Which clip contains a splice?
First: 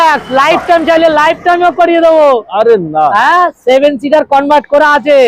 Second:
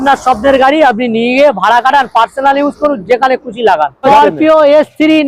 second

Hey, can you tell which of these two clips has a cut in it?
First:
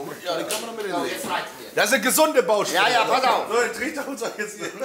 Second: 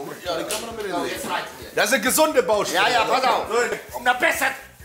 second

